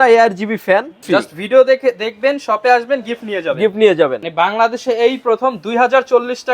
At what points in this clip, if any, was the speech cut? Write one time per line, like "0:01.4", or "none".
0:01.0
0:04.2